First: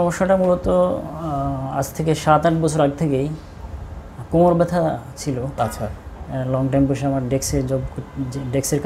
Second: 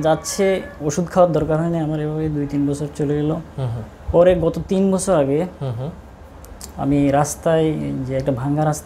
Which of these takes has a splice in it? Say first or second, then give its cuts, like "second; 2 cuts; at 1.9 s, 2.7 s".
first; 1 cut; at 5.5 s